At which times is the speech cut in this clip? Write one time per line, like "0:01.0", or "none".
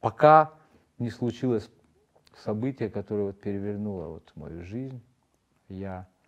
none